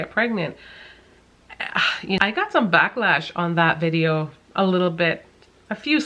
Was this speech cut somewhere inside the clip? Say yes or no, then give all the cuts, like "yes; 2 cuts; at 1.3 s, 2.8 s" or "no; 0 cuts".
yes; 1 cut; at 2.2 s